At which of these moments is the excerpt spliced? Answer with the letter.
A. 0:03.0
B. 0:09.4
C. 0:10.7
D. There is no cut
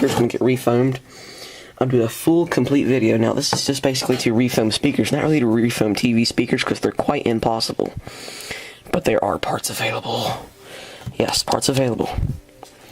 B